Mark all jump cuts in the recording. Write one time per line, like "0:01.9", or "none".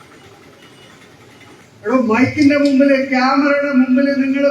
0:01.6